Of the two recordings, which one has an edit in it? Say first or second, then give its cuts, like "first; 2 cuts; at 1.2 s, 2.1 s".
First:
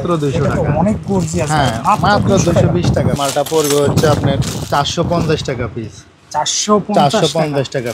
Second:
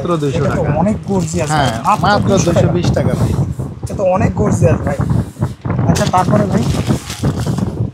first; 1 cut; at 3.2 s